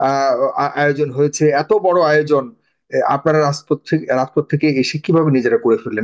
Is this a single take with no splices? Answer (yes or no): yes